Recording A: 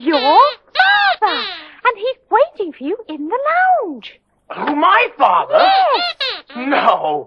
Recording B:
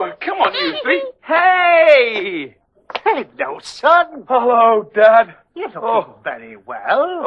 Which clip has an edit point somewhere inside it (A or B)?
B